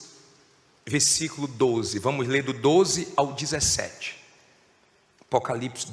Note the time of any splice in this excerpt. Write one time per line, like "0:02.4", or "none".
0:02.5

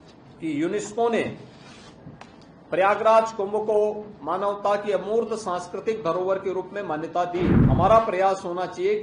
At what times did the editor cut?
0:07.6

